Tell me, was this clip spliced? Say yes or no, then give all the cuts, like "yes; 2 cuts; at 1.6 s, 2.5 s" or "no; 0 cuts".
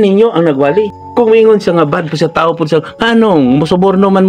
yes; 1 cut; at 1.0 s